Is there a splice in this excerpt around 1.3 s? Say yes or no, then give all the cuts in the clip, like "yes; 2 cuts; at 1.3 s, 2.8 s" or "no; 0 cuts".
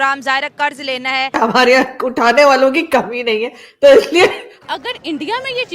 yes; 2 cuts; at 1.3 s, 4.5 s